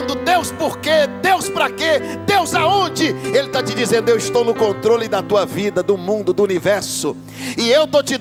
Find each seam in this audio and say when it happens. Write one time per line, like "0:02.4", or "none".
none